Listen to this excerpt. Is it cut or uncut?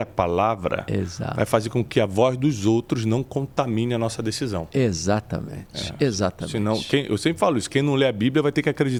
uncut